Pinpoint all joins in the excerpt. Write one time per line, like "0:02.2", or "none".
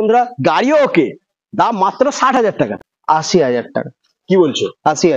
0:02.7